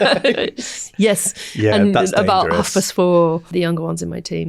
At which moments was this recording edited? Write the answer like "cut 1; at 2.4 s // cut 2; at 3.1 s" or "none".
cut 1; at 3.5 s